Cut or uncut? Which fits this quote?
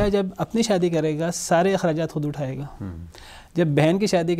uncut